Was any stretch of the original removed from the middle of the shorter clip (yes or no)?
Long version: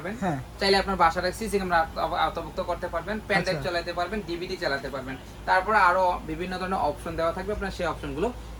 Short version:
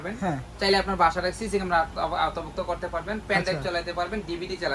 no